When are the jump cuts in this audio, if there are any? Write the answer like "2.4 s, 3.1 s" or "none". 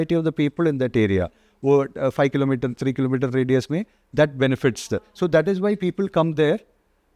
none